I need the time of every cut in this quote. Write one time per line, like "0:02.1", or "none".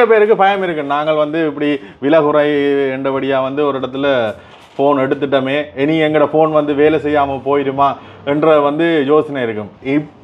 none